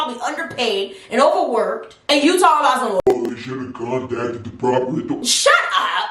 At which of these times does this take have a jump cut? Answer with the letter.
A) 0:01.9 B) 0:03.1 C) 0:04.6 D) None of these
D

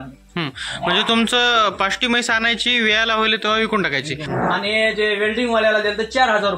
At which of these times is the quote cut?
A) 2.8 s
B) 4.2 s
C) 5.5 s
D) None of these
B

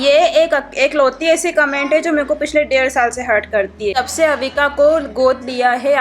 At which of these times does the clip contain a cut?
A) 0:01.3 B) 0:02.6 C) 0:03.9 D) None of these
C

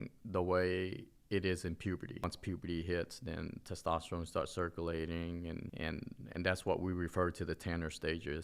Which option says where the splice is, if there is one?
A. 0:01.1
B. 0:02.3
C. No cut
B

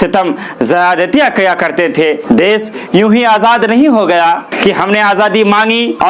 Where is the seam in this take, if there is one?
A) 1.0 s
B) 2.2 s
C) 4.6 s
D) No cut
B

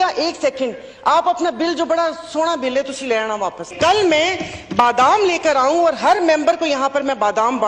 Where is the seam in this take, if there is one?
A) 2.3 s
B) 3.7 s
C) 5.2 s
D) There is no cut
B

